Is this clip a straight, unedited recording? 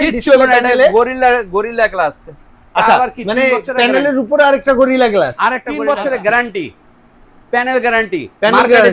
no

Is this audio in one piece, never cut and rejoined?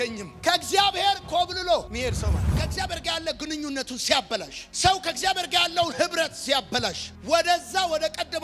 no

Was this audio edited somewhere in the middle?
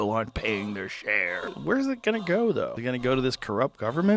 yes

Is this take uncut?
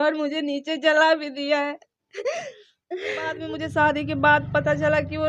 no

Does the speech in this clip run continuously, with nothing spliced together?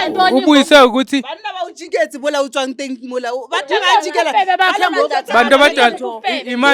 yes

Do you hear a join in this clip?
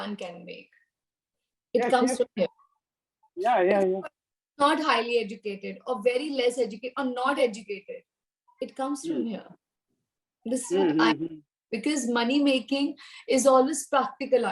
no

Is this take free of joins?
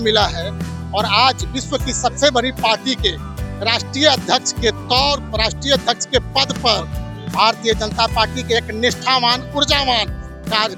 yes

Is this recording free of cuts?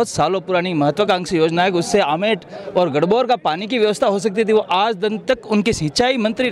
yes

